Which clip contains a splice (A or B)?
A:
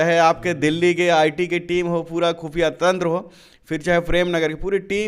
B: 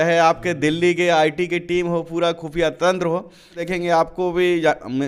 B